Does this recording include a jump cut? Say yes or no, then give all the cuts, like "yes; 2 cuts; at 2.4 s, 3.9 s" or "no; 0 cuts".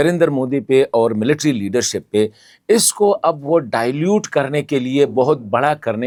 no; 0 cuts